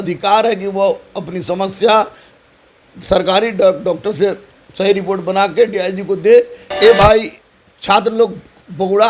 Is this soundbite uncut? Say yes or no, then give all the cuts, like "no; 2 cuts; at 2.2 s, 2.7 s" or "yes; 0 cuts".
no; 1 cut; at 6.6 s